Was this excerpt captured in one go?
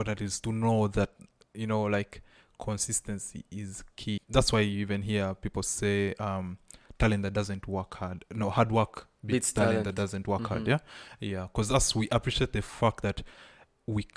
no; 1 cut; at 4.2 s

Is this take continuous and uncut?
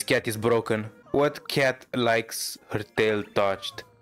yes; 0 cuts

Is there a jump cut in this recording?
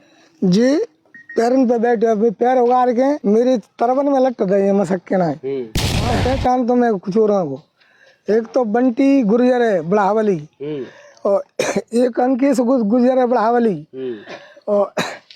yes; 2 cuts; at 3.2 s, 6.2 s

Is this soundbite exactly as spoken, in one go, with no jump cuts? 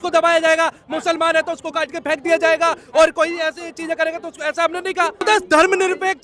no; 1 cut; at 5.2 s

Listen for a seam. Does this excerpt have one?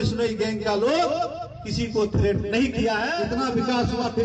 yes; 1 cut; at 3.2 s

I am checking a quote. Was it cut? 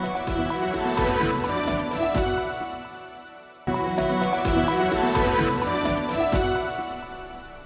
yes; 1 cut; at 3.9 s

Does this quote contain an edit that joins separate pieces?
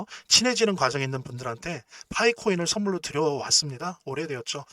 no; 0 cuts

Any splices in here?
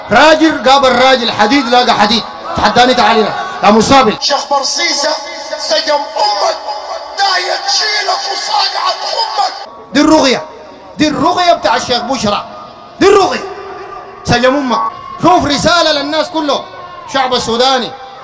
yes; 2 cuts; at 4.2 s, 14.9 s

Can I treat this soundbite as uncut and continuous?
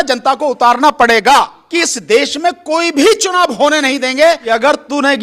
no; 2 cuts; at 1.6 s, 4.4 s

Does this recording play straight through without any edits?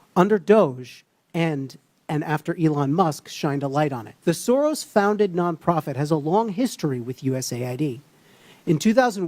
no; 1 cut; at 4.1 s

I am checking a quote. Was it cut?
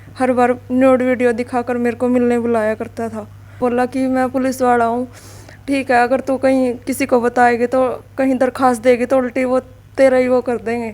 yes; 1 cut; at 3.6 s

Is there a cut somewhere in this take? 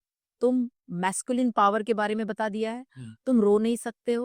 no; 0 cuts

